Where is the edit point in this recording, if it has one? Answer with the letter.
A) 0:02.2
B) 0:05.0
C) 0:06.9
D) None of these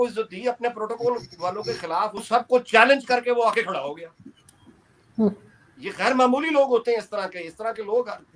A